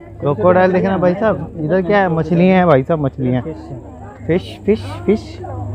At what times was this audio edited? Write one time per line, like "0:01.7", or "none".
none